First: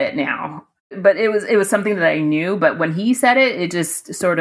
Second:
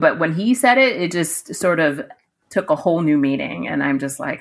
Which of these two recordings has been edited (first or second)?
first